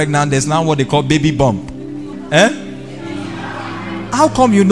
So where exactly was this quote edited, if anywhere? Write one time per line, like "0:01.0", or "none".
0:02.1